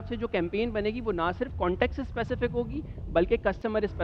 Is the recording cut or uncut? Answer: uncut